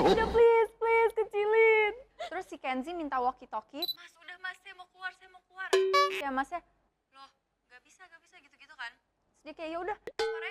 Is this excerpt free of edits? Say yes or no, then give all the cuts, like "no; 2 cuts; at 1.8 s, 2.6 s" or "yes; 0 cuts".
no; 2 cuts; at 1.9 s, 4.1 s